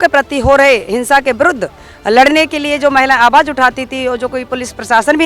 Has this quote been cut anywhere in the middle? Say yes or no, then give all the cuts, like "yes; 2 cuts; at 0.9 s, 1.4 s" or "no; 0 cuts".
no; 0 cuts